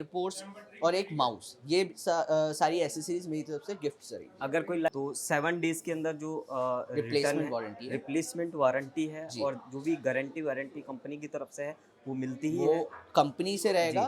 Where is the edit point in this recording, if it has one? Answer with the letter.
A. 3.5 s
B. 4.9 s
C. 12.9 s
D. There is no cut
B